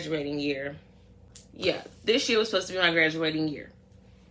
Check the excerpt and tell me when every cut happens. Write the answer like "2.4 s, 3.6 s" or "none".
none